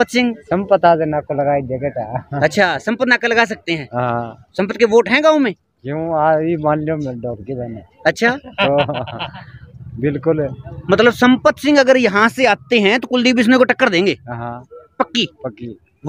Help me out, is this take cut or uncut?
uncut